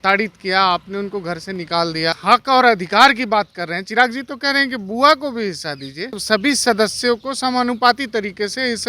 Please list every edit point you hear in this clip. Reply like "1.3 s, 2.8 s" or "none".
2.2 s, 6.2 s

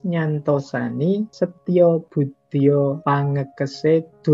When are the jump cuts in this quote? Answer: 1.3 s, 3.0 s

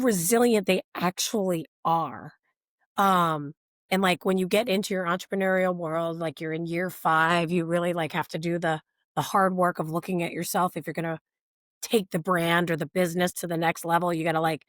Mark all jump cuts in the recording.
none

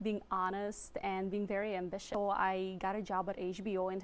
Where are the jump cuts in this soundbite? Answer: 2.1 s

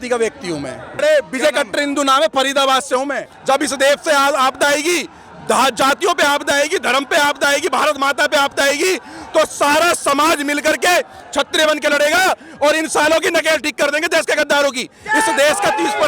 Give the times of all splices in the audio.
1.0 s, 3.3 s

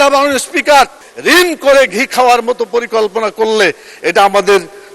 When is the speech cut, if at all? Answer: 1.0 s

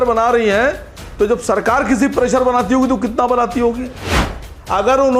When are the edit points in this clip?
4.2 s

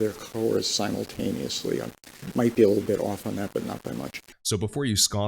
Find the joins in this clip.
4.3 s

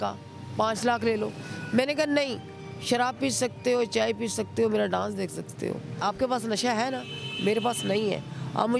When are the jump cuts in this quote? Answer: 6.0 s

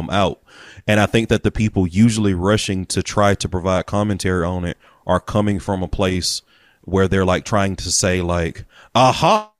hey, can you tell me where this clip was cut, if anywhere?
none

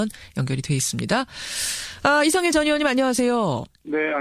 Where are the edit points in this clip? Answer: none

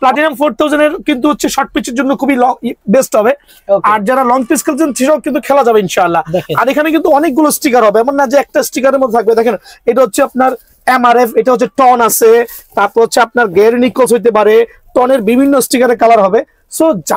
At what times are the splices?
none

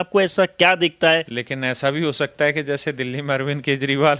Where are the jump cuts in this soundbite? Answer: 1.3 s

